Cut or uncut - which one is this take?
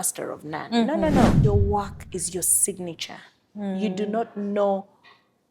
cut